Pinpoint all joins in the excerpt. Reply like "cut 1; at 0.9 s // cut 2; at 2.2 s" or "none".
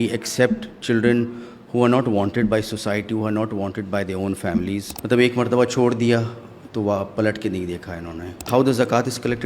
cut 1; at 4.9 s // cut 2; at 8.5 s